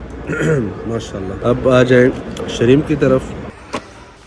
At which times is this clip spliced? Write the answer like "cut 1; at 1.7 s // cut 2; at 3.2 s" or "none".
cut 1; at 1.4 s // cut 2; at 3.5 s